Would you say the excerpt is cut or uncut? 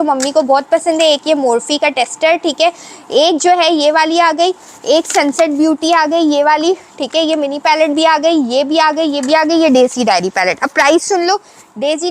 uncut